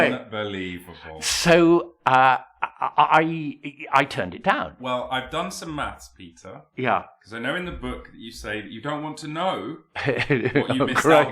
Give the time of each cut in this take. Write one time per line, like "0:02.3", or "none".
0:04.8